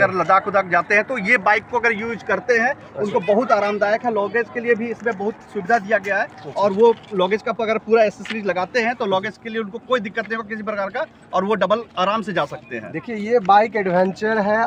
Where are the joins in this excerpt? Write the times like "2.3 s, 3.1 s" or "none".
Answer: none